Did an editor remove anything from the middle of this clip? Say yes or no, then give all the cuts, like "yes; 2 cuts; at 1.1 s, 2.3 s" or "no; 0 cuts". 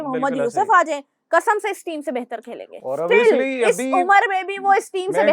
no; 0 cuts